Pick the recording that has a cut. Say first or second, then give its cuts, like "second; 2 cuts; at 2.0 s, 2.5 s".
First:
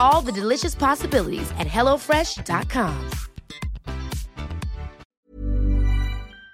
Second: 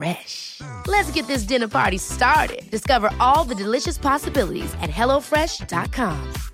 first; 1 cut; at 5.0 s